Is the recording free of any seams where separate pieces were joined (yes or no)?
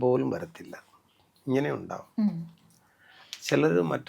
yes